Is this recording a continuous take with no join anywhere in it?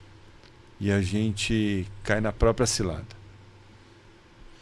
yes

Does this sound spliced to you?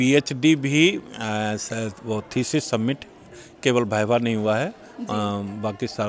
no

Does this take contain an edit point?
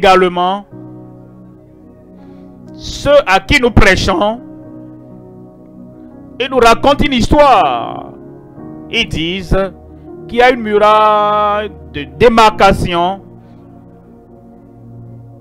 no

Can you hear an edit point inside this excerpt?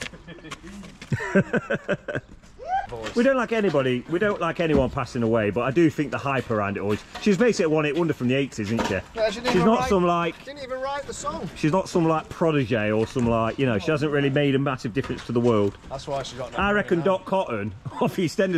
yes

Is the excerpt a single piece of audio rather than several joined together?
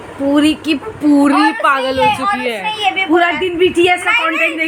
yes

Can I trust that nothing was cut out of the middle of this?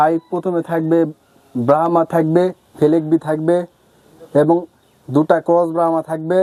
yes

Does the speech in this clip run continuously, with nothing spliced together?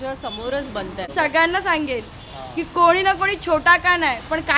no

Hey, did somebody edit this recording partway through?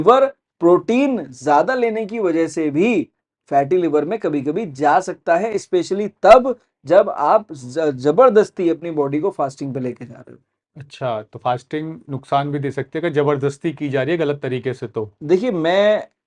no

